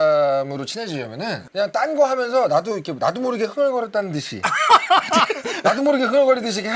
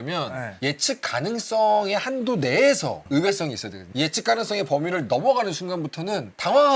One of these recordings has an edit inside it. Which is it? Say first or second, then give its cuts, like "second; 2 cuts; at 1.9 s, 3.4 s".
first; 2 cuts; at 1.4 s, 5.6 s